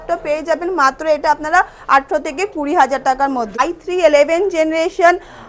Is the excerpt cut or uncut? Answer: cut